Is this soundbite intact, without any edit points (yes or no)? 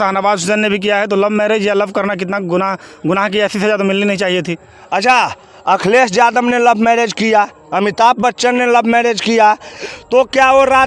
no